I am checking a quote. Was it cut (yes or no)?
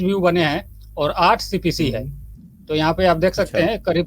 no